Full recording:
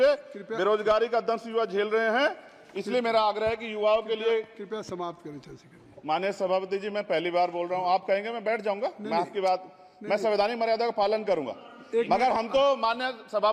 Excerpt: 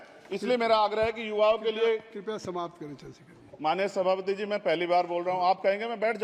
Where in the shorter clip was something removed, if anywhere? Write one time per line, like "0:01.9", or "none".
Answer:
none